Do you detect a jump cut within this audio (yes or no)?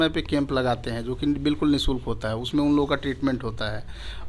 no